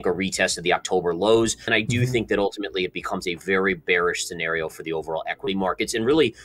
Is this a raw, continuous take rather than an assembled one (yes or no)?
no